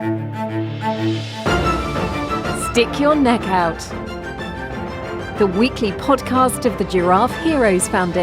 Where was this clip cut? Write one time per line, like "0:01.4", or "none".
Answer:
0:02.7